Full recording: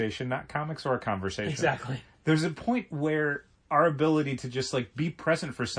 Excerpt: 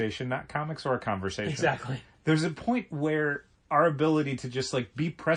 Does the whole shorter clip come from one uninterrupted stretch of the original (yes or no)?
yes